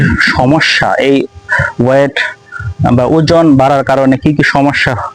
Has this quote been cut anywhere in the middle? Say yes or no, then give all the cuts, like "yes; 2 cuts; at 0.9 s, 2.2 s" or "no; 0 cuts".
no; 0 cuts